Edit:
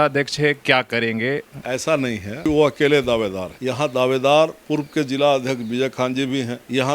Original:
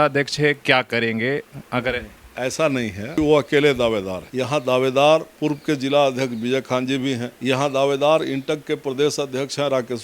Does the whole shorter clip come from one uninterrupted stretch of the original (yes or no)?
no